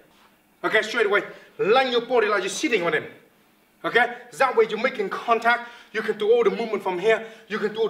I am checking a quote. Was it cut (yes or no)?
no